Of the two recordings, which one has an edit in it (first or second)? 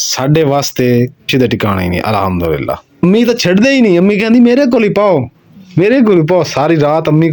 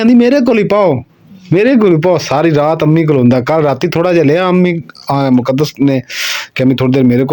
first